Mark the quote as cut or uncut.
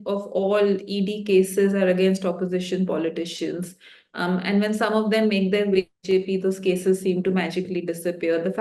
uncut